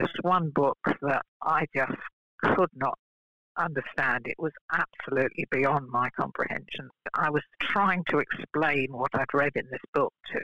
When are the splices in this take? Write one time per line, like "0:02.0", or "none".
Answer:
0:06.9